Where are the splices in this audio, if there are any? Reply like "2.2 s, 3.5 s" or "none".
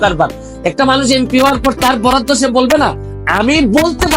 3.0 s